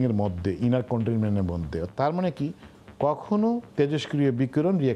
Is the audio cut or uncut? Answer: uncut